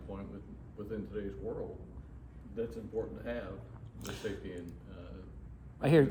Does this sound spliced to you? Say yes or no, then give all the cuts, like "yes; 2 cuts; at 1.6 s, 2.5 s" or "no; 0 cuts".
no; 0 cuts